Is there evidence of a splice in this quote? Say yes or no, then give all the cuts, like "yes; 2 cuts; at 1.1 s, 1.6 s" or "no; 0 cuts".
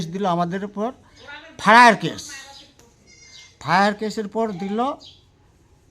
no; 0 cuts